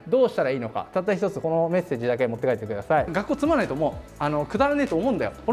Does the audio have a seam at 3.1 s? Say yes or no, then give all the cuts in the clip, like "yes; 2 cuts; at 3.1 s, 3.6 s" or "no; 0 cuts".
yes; 1 cut; at 3.1 s